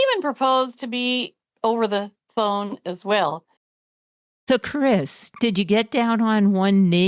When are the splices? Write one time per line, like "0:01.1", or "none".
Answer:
0:01.4